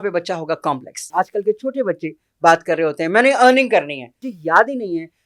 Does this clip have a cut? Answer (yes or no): yes